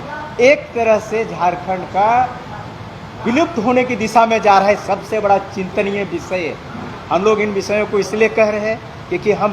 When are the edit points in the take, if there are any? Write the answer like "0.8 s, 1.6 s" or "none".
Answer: none